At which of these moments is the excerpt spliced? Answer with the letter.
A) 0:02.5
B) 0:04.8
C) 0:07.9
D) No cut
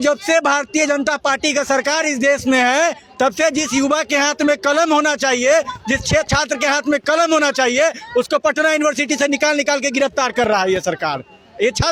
D